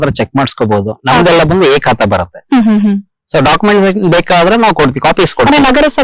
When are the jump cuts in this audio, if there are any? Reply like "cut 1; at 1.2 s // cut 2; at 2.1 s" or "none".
none